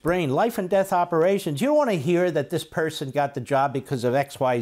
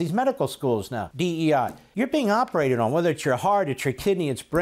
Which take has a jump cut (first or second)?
second